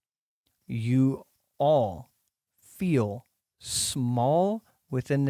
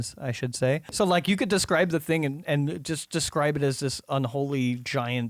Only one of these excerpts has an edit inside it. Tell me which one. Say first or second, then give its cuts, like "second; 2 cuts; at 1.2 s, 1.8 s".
second; 1 cut; at 0.9 s